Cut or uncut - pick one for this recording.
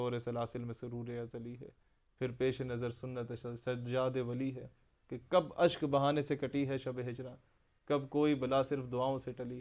uncut